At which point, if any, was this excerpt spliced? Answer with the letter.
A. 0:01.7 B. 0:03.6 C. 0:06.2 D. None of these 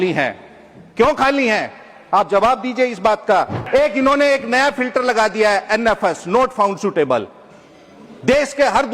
B